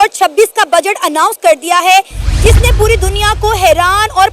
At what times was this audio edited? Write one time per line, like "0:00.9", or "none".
none